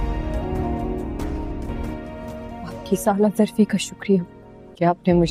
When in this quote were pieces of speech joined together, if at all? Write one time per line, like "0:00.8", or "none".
none